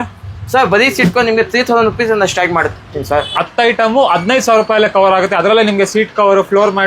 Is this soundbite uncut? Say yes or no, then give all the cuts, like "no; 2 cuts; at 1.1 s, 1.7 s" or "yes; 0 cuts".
no; 1 cut; at 3.3 s